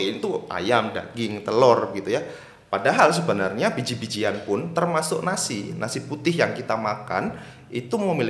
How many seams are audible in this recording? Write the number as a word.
zero